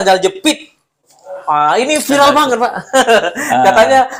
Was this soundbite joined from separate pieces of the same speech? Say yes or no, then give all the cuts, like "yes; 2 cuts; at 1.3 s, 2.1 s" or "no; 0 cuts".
no; 0 cuts